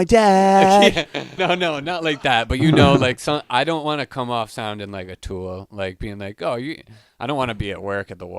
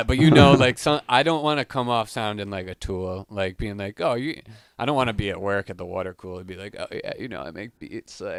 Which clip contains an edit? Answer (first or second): first